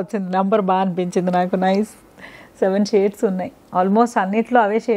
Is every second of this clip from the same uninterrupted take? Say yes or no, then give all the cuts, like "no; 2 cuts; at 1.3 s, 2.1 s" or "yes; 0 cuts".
yes; 0 cuts